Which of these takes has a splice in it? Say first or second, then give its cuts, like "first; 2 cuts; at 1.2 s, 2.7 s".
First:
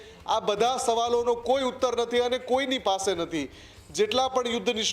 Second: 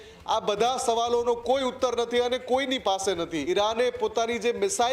second; 1 cut; at 3.4 s